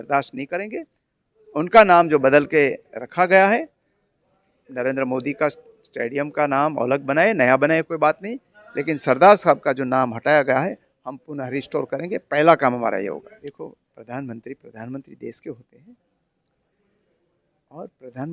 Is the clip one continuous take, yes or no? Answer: no